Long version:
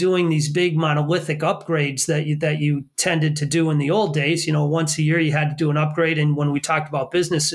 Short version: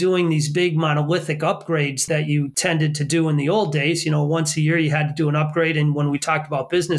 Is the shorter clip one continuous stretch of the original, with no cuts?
no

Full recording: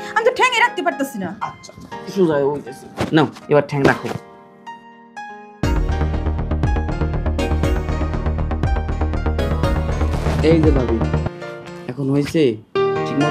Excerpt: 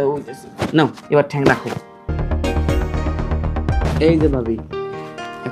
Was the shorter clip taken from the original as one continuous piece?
no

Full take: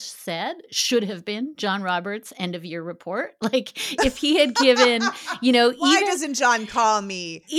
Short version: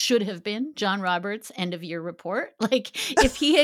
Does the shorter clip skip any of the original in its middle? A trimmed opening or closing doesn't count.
no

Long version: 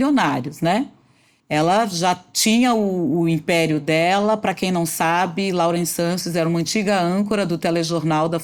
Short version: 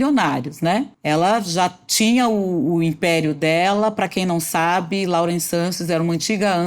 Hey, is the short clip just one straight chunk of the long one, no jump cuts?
no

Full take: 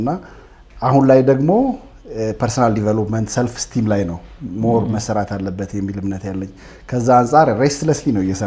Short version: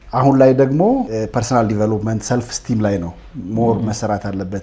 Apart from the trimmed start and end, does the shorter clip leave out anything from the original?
yes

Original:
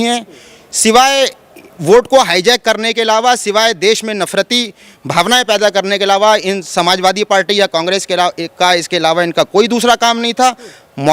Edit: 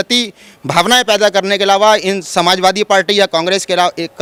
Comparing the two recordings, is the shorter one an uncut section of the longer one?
yes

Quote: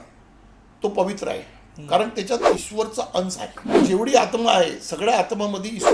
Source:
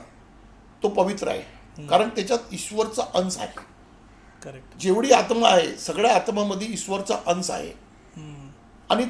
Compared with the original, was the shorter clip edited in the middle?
yes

